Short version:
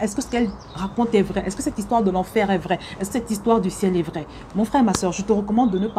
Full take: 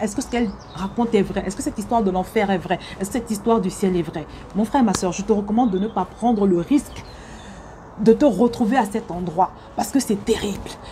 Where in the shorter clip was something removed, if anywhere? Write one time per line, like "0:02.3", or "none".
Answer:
none